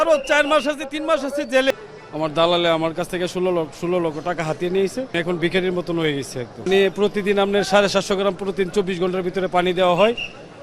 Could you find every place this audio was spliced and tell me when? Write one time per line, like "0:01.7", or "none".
0:01.7
0:05.1
0:06.7

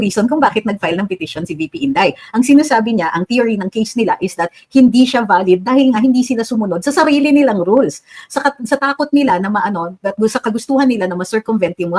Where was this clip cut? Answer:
none

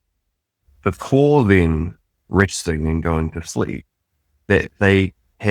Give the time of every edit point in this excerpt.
none

